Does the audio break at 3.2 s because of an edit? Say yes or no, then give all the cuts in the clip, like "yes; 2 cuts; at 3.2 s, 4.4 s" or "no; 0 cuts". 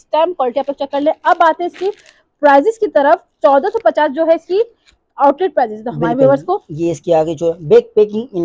no; 0 cuts